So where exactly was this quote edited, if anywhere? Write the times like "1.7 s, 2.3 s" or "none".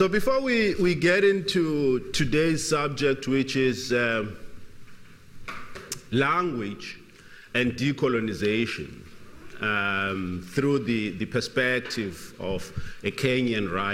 8.6 s